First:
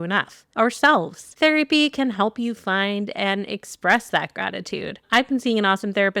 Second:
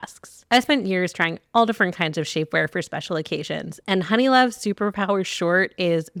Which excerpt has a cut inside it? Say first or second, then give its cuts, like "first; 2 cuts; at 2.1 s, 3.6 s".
first; 2 cuts; at 1.2 s, 4.9 s